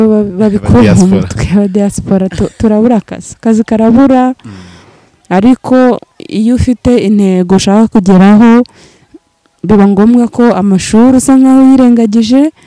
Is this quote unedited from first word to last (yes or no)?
yes